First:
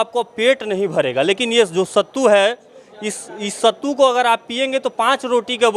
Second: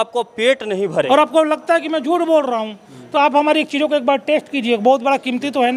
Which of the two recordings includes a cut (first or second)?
second